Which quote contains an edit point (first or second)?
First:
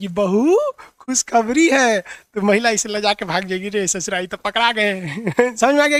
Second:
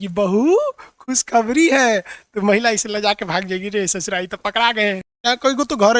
second